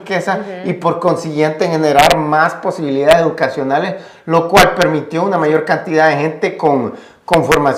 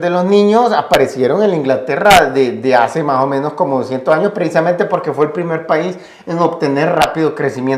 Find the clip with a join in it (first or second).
first